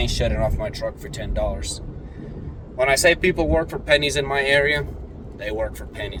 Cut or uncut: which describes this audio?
uncut